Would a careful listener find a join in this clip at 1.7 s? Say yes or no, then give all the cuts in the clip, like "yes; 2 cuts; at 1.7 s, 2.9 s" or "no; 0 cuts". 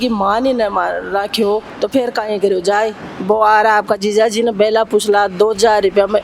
yes; 1 cut; at 1.7 s